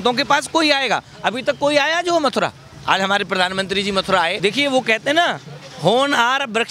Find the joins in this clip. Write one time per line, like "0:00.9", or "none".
0:04.3